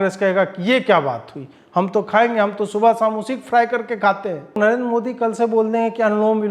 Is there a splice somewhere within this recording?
yes; 1 cut; at 4.6 s

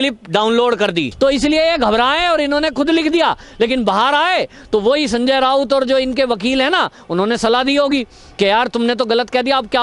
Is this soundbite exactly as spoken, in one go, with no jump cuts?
no; 1 cut; at 1.1 s

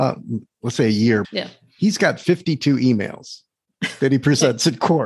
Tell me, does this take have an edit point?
yes; 1 cut; at 1.3 s

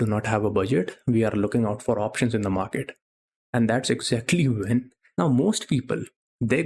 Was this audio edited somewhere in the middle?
yes; 1 cut; at 5.0 s

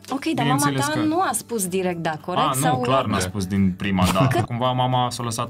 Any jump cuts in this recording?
yes; 1 cut; at 4.4 s

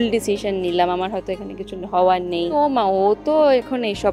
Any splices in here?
yes; 1 cut; at 2.5 s

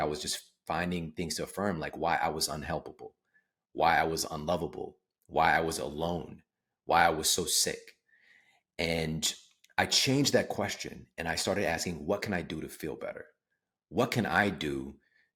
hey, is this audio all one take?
yes; 0 cuts

